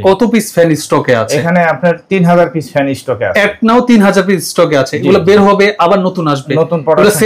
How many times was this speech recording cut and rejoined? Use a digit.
0